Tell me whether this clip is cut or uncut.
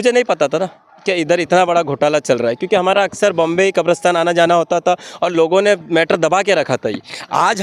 uncut